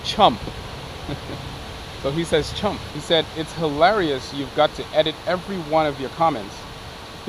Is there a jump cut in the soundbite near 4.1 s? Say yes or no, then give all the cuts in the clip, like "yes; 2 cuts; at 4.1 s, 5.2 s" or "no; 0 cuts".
no; 1 cut; at 2.9 s